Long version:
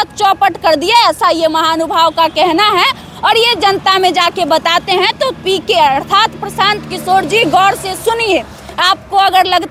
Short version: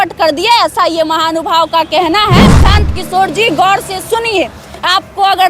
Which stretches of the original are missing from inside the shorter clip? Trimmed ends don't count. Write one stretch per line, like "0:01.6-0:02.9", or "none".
0:03.0-0:06.5